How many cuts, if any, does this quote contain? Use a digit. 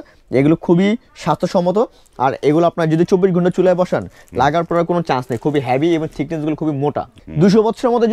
1